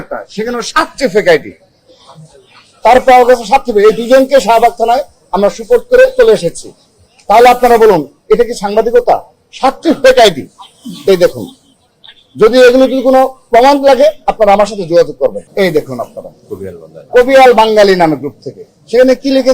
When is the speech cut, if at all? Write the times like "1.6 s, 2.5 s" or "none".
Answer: 15.4 s